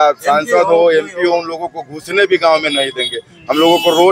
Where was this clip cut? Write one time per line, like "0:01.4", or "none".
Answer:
none